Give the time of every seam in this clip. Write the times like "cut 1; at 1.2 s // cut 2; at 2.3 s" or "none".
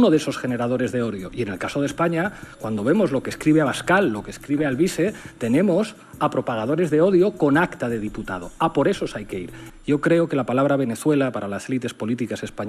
cut 1; at 9.6 s